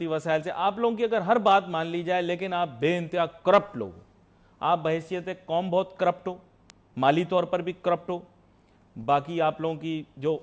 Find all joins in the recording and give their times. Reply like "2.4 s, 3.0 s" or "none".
none